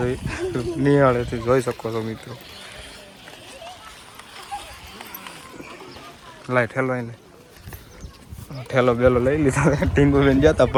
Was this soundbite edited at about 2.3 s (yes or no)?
no